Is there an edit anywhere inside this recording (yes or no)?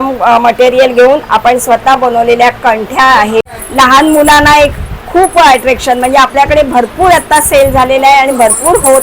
yes